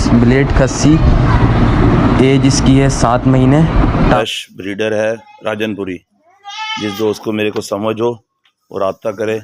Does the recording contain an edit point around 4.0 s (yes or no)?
yes